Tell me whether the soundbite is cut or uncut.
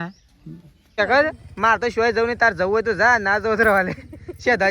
cut